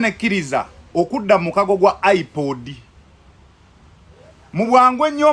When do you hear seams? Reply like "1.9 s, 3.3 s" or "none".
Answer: 3.3 s